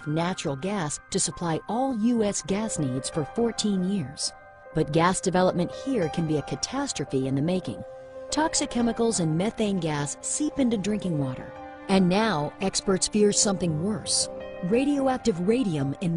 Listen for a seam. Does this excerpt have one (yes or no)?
yes